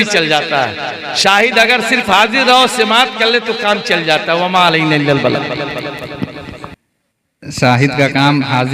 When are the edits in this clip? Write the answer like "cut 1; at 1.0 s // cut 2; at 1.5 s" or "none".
cut 1; at 6.7 s

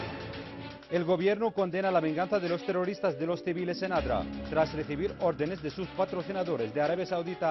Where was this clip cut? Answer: cut 1; at 0.9 s

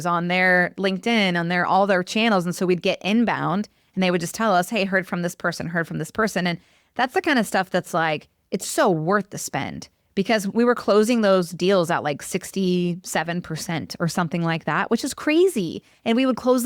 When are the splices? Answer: cut 1; at 10.5 s

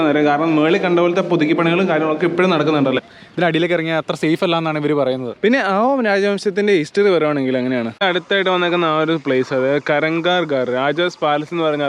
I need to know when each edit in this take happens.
cut 1; at 3.0 s // cut 2; at 8.0 s

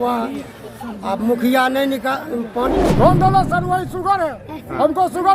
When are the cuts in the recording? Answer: cut 1; at 2.7 s

